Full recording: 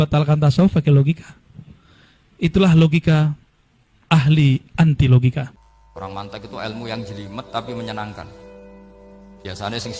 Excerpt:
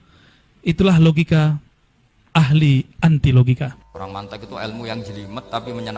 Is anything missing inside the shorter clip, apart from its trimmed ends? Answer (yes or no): yes